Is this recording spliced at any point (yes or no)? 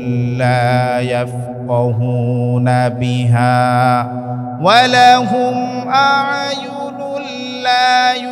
no